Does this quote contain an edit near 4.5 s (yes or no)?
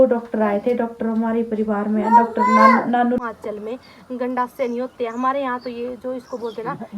no